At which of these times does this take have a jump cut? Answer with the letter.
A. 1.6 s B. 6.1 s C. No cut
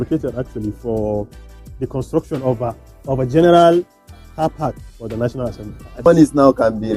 B